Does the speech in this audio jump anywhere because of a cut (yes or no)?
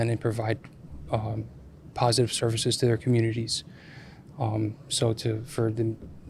no